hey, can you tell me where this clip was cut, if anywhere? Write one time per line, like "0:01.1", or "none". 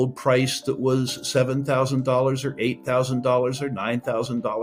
none